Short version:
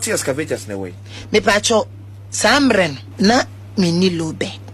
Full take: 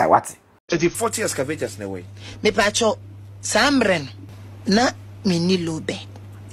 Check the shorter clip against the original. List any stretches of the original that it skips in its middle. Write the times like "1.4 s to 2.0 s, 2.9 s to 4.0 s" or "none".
4.1 s to 4.5 s